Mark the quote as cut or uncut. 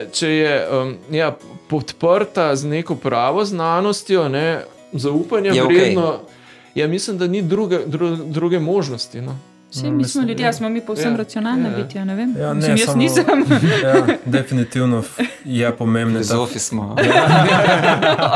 uncut